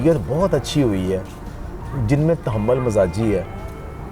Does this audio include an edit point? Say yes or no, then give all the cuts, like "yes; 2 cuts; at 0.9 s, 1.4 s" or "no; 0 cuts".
no; 0 cuts